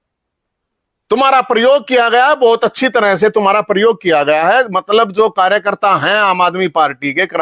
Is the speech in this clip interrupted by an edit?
no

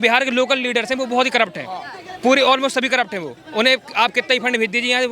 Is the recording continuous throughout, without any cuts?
yes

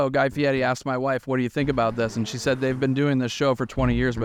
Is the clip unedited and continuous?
yes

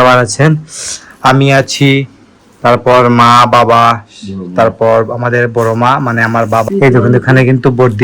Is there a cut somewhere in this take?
yes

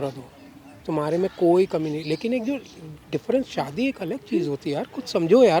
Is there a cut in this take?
no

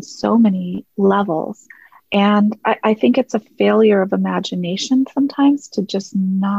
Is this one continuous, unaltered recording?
yes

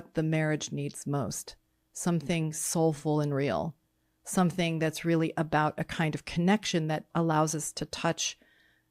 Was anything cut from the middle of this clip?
no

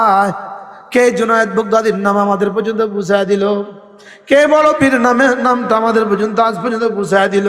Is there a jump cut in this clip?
no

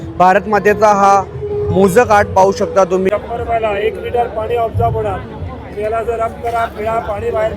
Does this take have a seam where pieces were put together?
yes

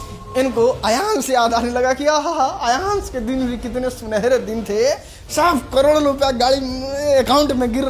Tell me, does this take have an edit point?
no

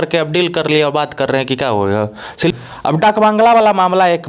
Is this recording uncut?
no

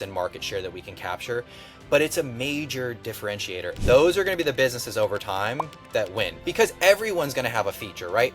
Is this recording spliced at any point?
yes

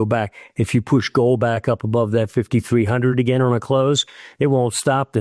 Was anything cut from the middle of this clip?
no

